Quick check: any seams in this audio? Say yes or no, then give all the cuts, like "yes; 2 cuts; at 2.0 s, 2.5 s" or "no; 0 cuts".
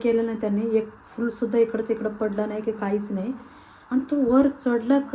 no; 0 cuts